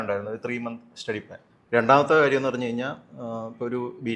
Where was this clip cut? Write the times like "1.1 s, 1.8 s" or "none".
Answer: 1.4 s